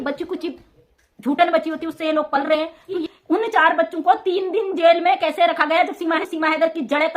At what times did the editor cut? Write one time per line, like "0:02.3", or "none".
0:02.9
0:06.2